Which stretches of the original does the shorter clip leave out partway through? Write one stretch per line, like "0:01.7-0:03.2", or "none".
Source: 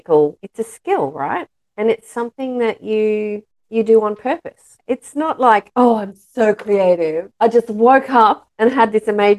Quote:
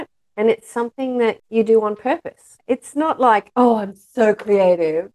0:02.8-0:03.6